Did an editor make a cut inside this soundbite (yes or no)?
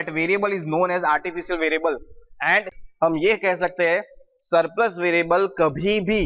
yes